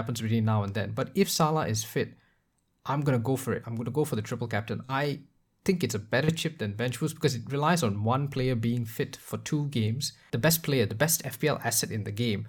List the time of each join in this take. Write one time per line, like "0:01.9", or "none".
0:10.2